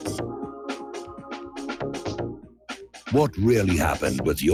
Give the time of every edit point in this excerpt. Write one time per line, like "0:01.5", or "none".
none